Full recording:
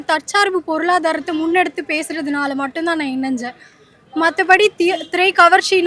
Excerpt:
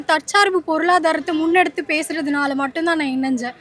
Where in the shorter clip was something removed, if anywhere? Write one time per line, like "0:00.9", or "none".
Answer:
none